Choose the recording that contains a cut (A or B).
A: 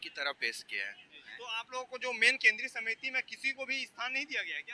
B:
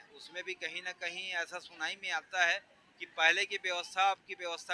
A